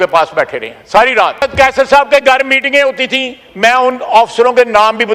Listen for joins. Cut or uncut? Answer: cut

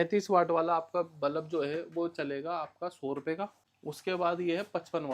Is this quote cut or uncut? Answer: cut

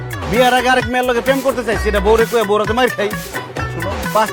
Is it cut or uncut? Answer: uncut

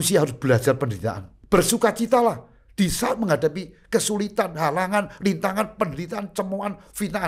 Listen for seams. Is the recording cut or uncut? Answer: cut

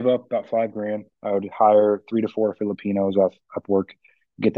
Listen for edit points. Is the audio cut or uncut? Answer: uncut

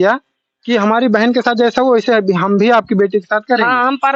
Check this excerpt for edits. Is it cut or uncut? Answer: uncut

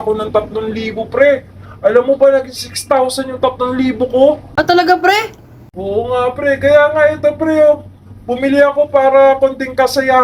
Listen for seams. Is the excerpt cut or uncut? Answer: cut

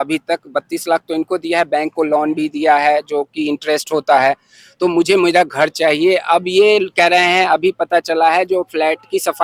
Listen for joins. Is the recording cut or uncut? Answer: uncut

